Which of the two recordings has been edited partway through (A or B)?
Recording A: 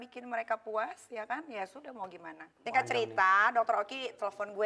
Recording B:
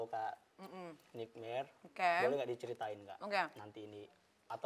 A